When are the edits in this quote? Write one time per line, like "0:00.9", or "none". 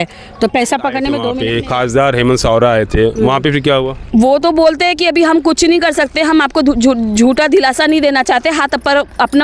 0:01.4